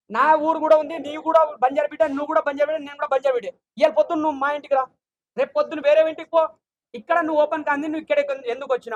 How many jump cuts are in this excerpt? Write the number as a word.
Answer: zero